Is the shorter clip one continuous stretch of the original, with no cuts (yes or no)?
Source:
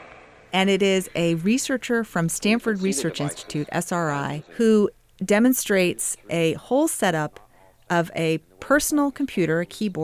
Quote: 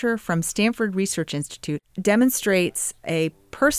no